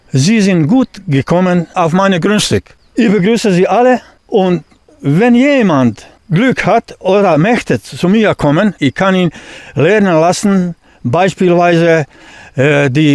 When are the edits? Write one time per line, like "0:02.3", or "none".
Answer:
0:01.7
0:02.8
0:04.1
0:06.1
0:08.8